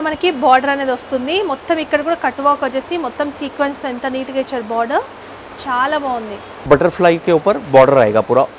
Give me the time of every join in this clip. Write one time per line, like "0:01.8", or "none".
0:06.6

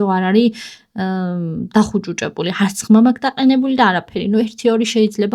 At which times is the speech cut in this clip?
none

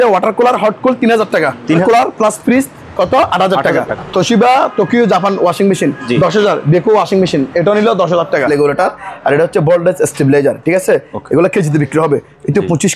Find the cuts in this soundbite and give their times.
0:01.8
0:03.9
0:08.5

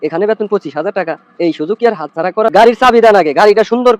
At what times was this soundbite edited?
0:02.5

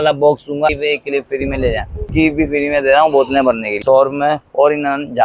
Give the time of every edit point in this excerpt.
0:00.8
0:02.1
0:03.8

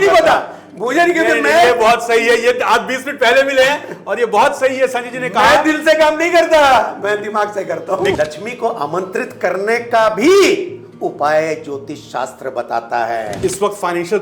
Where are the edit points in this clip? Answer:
0:08.1
0:13.3

